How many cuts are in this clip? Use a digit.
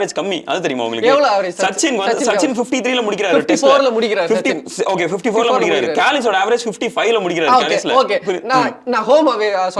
0